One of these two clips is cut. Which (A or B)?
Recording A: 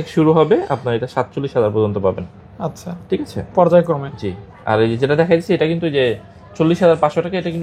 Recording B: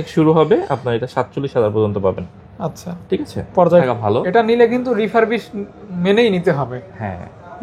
B